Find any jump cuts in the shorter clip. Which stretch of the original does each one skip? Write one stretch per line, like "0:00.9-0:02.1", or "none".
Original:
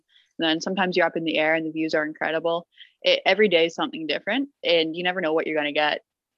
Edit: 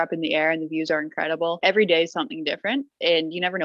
0:02.6-0:03.2